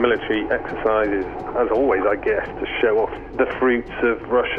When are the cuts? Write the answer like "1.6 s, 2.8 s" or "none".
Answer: 1.4 s, 3.2 s